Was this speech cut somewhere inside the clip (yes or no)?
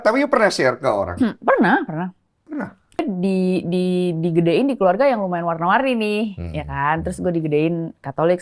yes